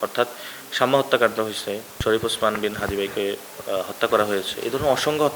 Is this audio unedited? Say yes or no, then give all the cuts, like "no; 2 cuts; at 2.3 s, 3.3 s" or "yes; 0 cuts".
no; 1 cut; at 2.0 s